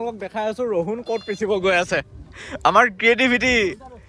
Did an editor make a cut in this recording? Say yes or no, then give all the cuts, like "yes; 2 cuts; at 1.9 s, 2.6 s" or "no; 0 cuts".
no; 0 cuts